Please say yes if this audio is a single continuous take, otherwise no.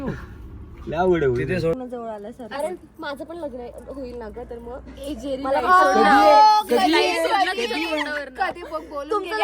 no